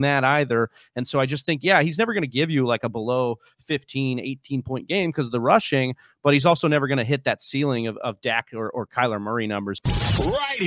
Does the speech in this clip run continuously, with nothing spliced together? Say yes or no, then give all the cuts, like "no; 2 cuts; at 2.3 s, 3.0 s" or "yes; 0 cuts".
no; 1 cut; at 9.8 s